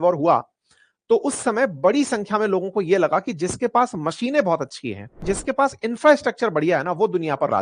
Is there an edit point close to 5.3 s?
yes; 1 cut; at 5.3 s

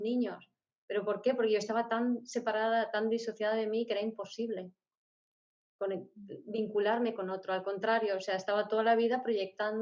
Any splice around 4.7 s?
no; 0 cuts

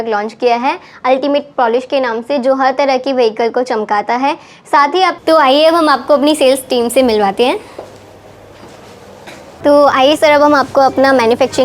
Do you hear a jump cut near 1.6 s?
no; 2 cuts; at 5.2 s, 9.5 s

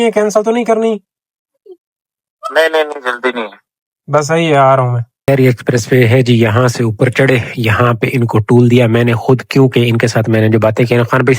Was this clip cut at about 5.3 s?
yes; 1 cut; at 5.3 s

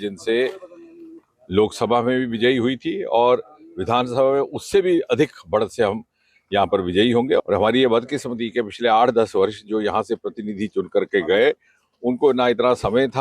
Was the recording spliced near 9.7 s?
no; 1 cut; at 7.4 s

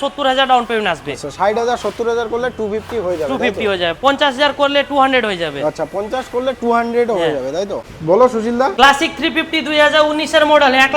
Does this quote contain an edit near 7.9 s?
yes; 2 cuts; at 7.9 s, 8.7 s

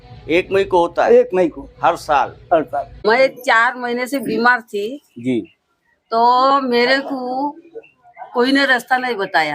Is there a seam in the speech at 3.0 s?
yes; 1 cut; at 3.0 s

